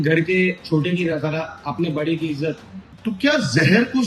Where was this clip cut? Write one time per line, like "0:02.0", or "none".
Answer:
0:02.9